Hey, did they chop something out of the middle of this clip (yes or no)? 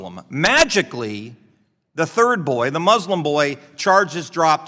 no